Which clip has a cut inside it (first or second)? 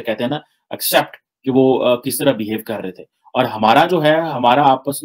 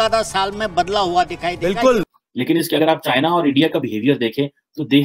second